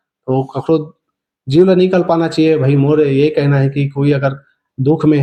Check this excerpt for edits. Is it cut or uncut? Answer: uncut